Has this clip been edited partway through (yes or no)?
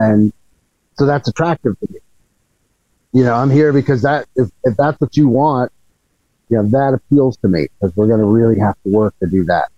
no